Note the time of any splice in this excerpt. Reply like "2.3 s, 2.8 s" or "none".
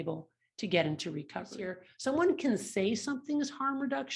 1.6 s